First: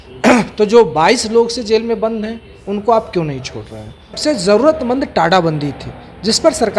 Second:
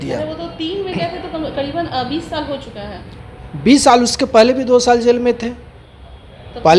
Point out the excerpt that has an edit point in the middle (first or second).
first